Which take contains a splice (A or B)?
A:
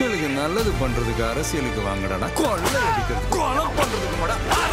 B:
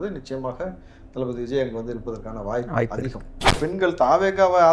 B